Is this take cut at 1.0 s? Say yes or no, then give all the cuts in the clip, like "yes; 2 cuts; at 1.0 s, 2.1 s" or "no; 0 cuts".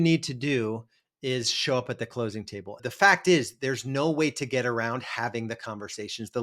no; 1 cut; at 2.8 s